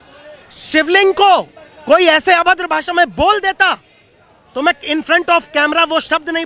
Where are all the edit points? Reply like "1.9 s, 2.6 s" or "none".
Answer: none